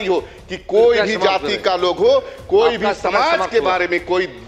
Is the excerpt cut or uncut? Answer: uncut